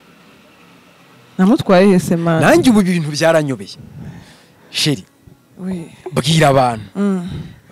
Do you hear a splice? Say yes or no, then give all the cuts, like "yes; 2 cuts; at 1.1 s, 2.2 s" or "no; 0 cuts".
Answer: no; 0 cuts